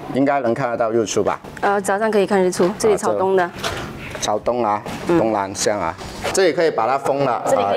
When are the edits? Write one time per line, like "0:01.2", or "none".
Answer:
0:06.3